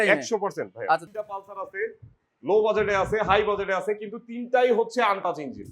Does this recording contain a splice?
yes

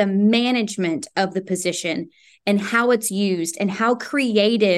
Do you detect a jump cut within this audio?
no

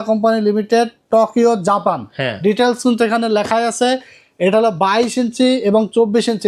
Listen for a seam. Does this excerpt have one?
no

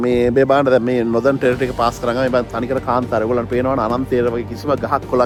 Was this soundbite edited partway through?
no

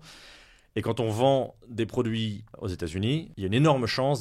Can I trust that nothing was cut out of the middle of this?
no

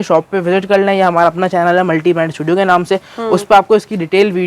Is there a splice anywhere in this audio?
no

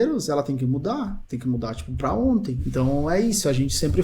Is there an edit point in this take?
yes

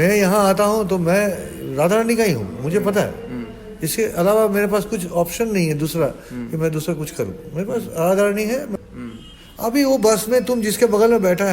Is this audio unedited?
no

